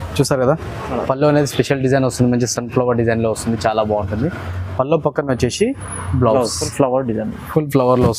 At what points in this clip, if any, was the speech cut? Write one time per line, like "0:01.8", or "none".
0:06.6